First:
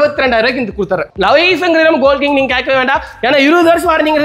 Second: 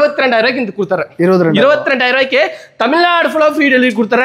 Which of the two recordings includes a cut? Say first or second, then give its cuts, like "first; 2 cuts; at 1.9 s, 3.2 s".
first; 1 cut; at 1.1 s